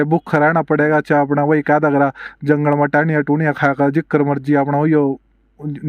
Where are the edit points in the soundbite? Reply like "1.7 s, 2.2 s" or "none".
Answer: none